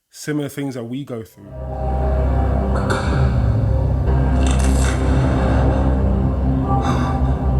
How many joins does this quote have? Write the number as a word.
one